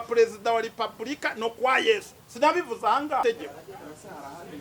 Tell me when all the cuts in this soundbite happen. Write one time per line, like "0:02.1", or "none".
0:03.2